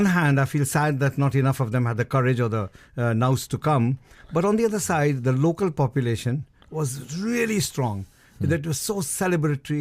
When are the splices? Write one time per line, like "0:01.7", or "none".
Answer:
0:07.2